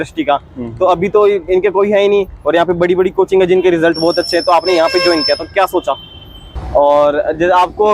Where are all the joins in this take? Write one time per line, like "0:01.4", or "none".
0:06.5